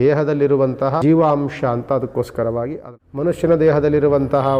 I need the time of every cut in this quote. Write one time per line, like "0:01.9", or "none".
0:01.0
0:02.8